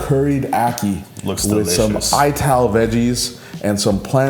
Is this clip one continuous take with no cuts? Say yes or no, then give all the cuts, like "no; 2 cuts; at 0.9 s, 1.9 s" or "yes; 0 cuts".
yes; 0 cuts